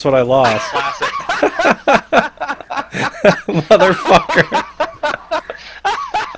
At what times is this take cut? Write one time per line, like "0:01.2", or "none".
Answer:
none